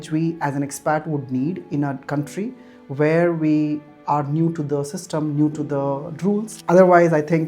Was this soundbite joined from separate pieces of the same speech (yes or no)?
yes